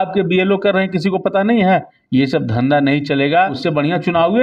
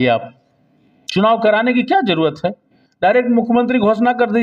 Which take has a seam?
first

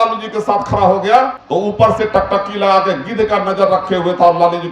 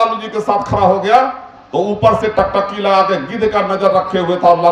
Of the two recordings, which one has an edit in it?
first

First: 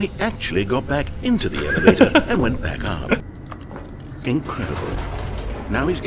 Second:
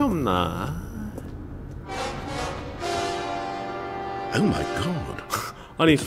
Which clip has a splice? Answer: first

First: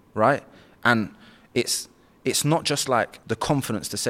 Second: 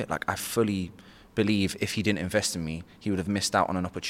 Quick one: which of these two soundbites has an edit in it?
first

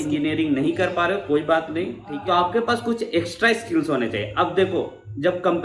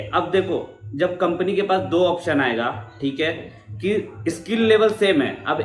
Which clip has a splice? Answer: first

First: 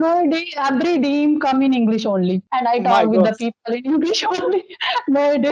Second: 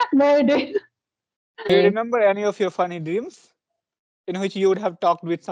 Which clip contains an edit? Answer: second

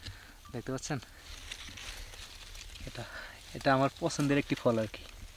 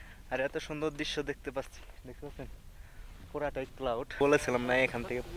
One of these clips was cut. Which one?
second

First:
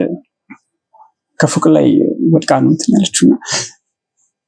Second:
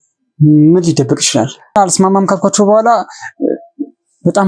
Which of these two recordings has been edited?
second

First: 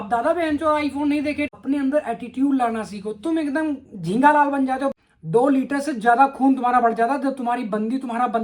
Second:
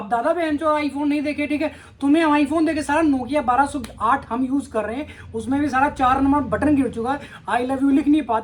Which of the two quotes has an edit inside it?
first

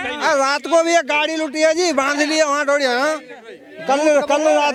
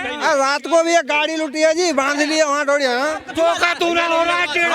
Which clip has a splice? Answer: second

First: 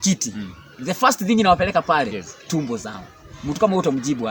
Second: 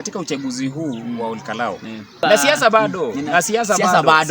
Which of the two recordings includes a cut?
second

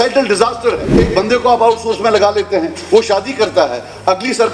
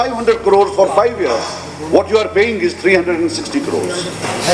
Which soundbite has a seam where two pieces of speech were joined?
first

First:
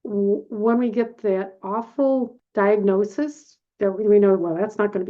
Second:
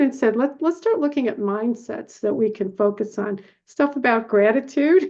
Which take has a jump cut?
first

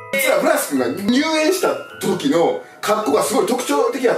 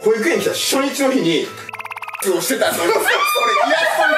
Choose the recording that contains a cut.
second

